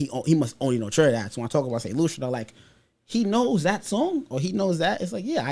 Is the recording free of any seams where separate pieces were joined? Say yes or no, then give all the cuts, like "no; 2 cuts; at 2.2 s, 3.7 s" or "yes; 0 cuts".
yes; 0 cuts